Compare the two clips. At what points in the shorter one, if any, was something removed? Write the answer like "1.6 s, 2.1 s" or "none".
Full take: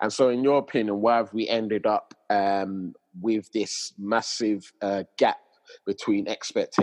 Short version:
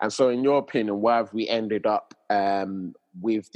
none

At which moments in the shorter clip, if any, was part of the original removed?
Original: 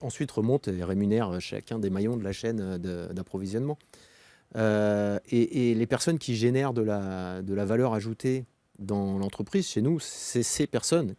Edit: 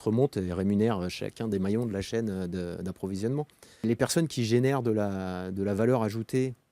3.8 s

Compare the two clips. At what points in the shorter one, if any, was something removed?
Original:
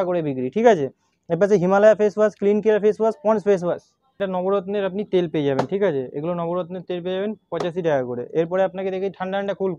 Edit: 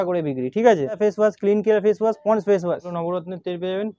1.0 s, 2.9 s

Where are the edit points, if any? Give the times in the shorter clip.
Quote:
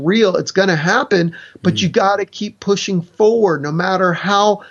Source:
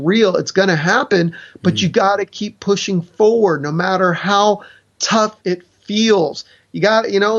none

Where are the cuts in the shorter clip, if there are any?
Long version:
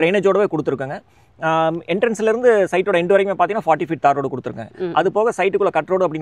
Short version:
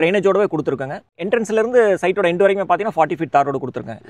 1.2 s

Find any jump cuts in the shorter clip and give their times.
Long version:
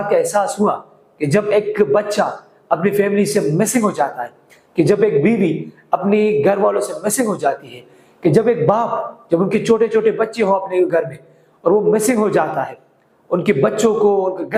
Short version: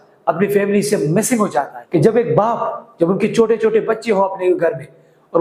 1.8 s

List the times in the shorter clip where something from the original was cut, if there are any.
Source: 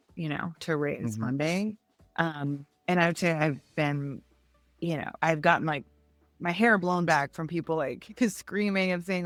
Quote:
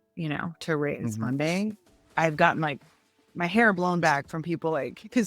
2.0 s

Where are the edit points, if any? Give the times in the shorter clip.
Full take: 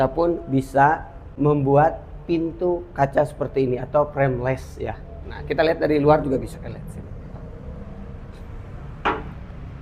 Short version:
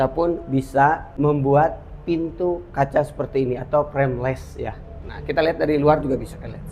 1.1 s

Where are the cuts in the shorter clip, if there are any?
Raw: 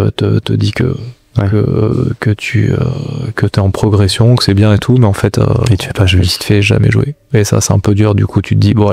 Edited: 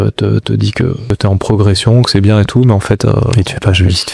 1.0 s

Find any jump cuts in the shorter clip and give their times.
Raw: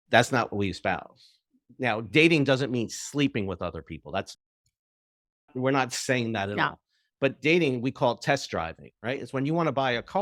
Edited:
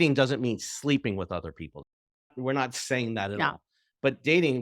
1.7 s

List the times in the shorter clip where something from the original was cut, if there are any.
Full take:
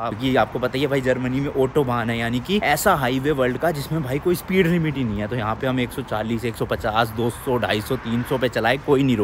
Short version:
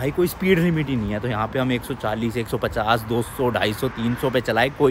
none

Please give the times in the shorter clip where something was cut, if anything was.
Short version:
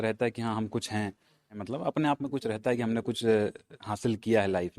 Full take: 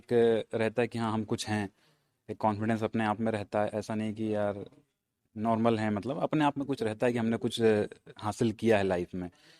1.6 s

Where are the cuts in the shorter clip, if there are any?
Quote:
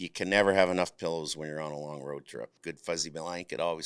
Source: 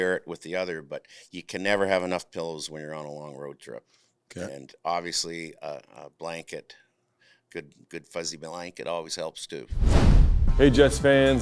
2.6 s

